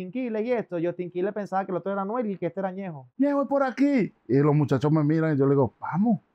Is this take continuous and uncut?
no; 1 cut; at 3.0 s

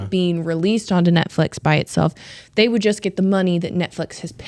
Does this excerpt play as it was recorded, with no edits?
yes; 0 cuts

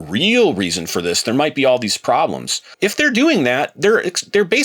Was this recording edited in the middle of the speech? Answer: yes; 1 cut; at 2.7 s

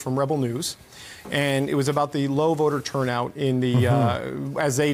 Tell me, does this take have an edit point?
no; 0 cuts

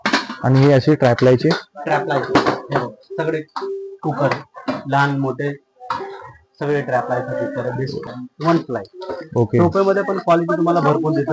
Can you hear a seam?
yes; 1 cut; at 8.0 s

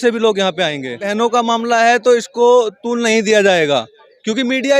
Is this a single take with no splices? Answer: no; 1 cut; at 1.1 s

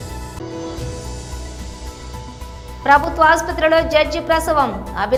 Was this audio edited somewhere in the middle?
no; 0 cuts

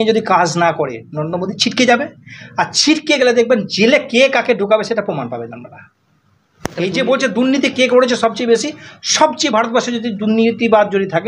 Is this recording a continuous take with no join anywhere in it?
yes; 0 cuts

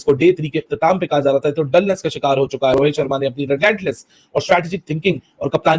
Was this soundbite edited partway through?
yes; 1 cut; at 2.7 s

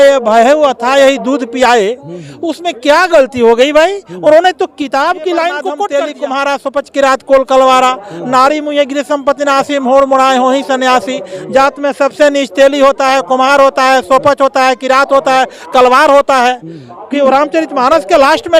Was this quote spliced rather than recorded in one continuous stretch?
yes; 1 cut; at 5.9 s

